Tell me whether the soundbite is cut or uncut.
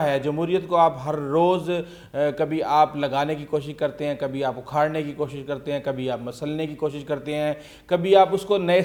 uncut